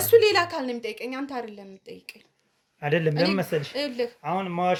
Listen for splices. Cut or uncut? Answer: uncut